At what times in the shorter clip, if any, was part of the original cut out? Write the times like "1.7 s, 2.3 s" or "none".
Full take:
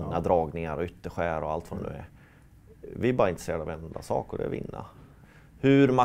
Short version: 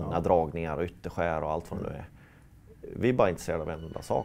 none